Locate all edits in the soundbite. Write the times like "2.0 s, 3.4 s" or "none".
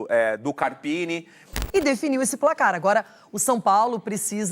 1.6 s